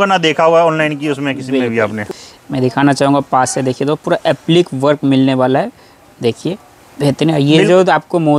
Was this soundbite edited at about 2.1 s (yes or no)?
yes